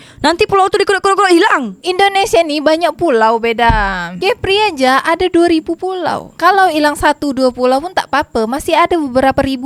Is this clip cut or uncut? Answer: uncut